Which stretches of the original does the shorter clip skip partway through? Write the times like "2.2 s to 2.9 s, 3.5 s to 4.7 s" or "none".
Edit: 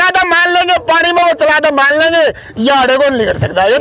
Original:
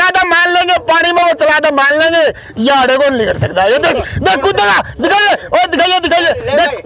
none